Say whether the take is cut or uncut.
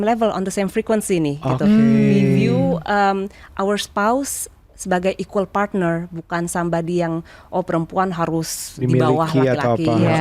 uncut